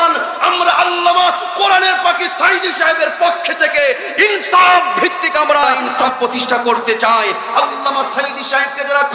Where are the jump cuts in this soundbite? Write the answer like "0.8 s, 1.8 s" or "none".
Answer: 5.8 s

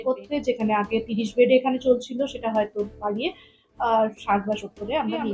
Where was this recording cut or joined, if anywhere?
none

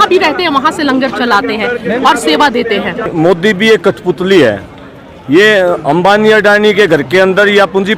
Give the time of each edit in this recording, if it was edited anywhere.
3.1 s

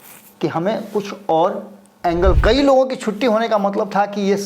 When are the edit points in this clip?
2.4 s

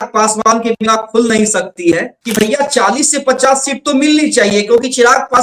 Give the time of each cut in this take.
2.2 s

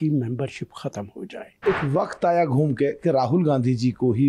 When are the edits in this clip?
1.6 s

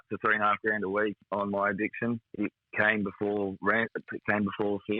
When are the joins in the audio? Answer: 1.2 s, 2.3 s

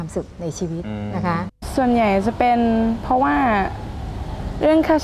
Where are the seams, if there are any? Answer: 1.6 s

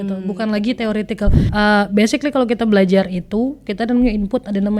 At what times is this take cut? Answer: 1.4 s

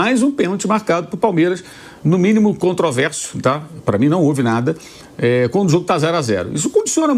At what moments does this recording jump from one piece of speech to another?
none

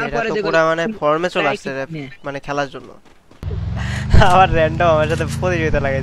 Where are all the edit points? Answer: 3.5 s

